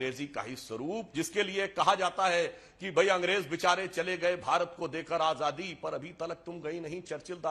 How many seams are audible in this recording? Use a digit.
1